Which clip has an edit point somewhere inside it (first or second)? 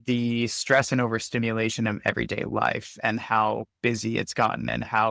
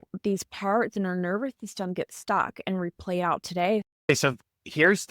second